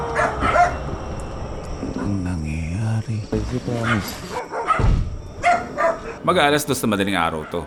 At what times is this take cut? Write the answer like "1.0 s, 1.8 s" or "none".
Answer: none